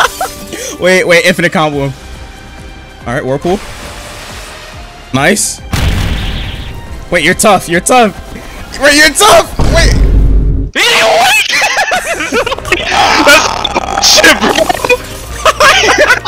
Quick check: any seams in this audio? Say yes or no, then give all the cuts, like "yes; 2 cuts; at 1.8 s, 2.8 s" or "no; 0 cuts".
no; 0 cuts